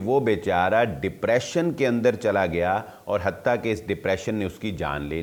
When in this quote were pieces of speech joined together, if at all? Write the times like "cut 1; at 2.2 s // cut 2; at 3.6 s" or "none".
none